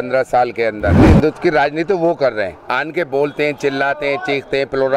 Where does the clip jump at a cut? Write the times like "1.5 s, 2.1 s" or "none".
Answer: 1.0 s